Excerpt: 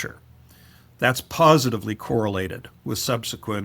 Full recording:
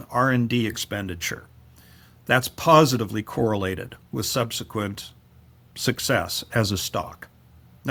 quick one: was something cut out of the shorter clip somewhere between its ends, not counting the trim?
no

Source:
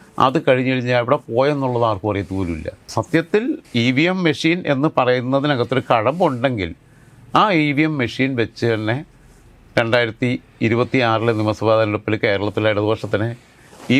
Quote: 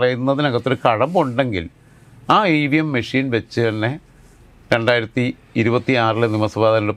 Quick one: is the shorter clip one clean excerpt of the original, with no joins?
yes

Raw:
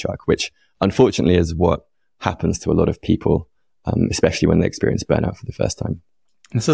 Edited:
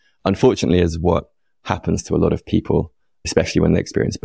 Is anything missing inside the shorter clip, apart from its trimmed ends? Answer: yes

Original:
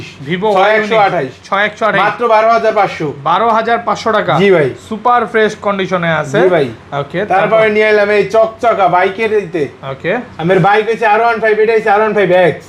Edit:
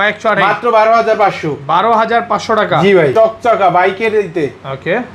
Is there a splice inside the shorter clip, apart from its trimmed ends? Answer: yes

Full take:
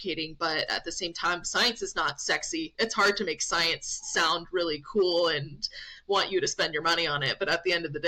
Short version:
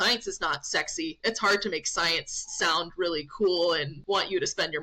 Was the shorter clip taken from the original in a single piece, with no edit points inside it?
no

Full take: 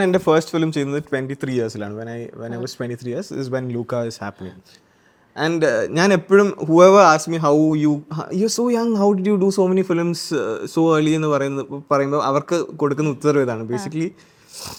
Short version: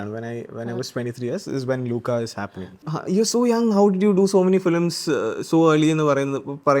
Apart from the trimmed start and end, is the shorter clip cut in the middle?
yes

